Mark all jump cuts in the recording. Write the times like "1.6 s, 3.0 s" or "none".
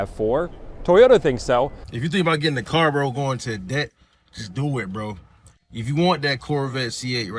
1.8 s

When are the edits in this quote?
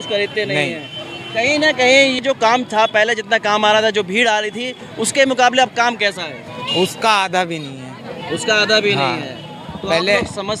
2.2 s

